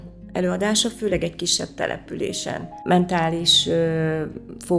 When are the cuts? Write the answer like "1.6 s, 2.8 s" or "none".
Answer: 2.7 s